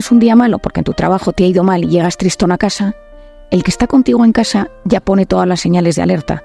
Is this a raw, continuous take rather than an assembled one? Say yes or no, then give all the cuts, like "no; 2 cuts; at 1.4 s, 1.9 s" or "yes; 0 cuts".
yes; 0 cuts